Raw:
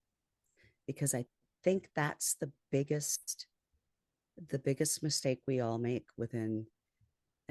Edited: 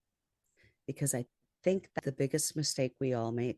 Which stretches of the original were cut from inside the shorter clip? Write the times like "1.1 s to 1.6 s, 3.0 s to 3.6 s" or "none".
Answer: 2.0 s to 4.5 s